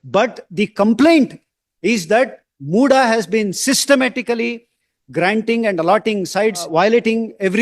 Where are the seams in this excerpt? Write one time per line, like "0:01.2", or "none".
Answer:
0:06.7